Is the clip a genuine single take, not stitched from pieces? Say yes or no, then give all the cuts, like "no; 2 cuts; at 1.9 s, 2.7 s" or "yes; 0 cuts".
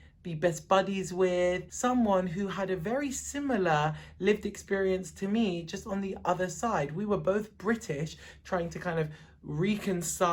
yes; 0 cuts